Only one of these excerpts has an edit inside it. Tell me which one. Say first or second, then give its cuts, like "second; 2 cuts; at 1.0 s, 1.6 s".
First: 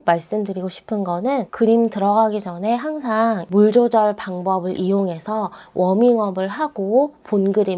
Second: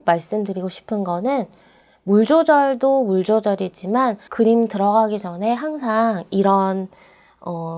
first; 2 cuts; at 1.5 s, 3.4 s